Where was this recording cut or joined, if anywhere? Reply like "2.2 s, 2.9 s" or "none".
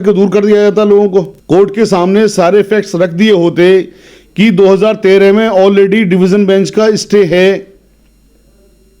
1.4 s